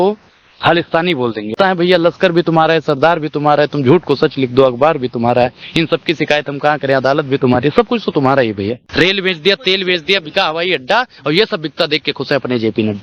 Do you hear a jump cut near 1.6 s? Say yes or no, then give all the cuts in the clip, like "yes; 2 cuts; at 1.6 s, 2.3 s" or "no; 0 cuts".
yes; 2 cuts; at 1.6 s, 8.9 s